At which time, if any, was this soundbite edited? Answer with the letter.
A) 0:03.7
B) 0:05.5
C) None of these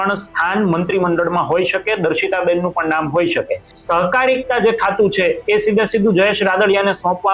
A